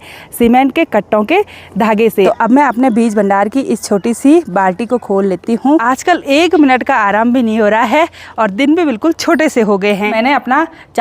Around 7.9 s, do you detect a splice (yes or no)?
no